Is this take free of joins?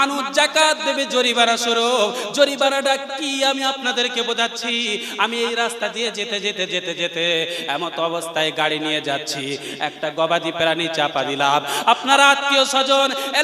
yes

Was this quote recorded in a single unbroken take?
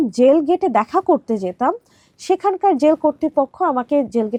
yes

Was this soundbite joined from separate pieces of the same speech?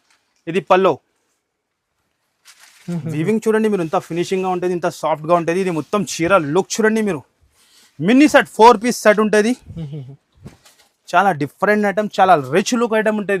no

